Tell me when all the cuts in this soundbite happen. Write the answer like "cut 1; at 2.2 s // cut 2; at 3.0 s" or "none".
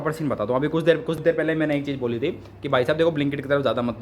cut 1; at 1.2 s